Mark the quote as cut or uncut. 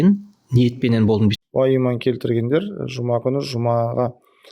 cut